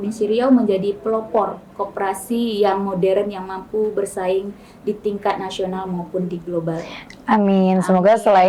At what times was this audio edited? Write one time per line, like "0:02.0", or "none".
none